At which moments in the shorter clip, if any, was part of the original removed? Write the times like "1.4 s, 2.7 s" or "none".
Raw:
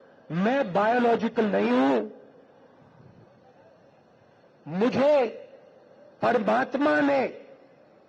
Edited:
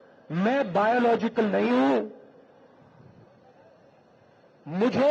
none